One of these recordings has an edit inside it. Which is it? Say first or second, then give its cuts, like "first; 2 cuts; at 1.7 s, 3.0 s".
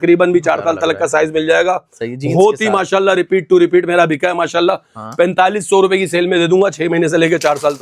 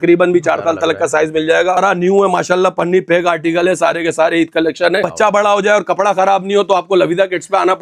second; 2 cuts; at 1.8 s, 5.1 s